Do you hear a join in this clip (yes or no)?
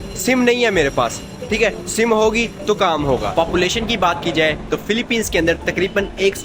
yes